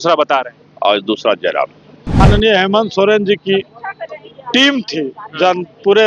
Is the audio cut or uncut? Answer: cut